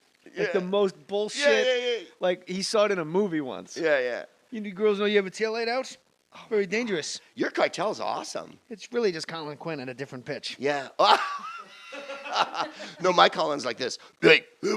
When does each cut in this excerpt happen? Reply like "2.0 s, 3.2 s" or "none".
13.0 s